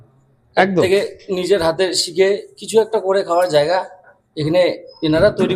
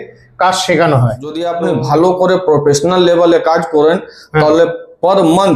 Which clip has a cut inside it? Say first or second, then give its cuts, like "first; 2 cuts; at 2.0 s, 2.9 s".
second; 1 cut; at 1.4 s